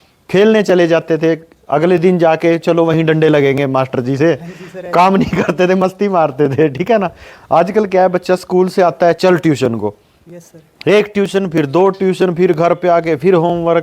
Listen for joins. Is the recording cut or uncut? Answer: uncut